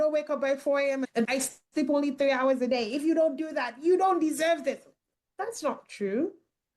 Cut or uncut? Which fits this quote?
cut